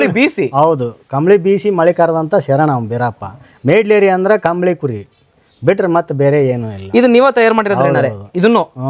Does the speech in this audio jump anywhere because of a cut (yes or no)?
no